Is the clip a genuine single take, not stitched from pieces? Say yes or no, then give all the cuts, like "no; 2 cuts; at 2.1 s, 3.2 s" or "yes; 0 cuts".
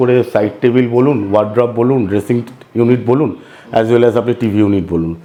yes; 0 cuts